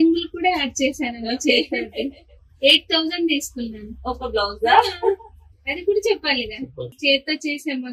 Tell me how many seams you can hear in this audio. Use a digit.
1